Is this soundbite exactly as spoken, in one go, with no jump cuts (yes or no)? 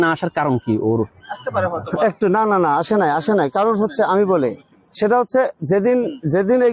yes